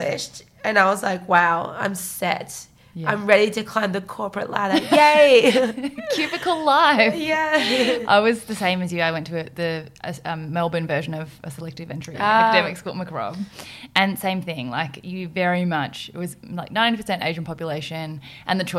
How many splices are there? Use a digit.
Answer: 0